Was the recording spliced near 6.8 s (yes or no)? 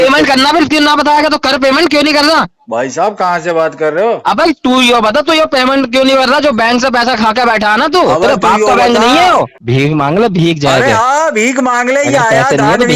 no